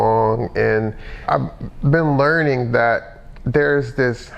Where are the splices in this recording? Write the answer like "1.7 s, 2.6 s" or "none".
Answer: 1.2 s

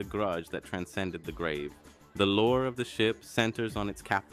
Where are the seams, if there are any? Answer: 1.2 s

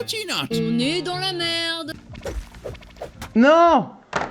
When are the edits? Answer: 1.9 s

